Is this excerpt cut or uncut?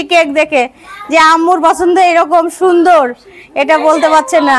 uncut